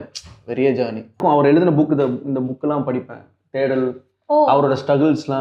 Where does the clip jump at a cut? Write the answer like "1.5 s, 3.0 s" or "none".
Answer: 1.2 s